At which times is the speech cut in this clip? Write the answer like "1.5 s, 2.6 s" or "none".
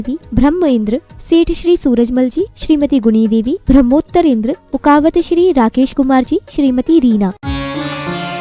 7.4 s